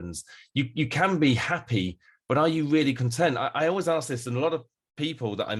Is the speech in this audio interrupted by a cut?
no; 0 cuts

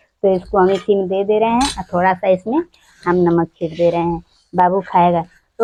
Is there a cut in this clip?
no; 0 cuts

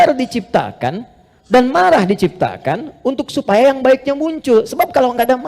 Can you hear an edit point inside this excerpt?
no; 0 cuts

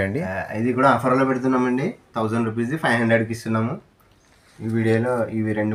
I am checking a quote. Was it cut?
no; 0 cuts

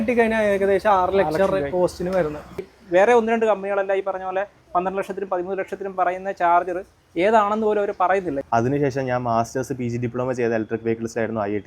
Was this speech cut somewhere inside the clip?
yes; 2 cuts; at 2.7 s, 8.3 s

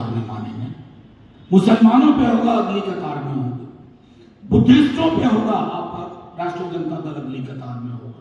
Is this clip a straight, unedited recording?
yes; 0 cuts

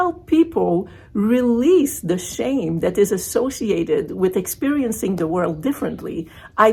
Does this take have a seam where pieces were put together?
no; 0 cuts

